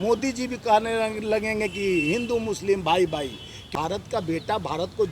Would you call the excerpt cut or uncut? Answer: cut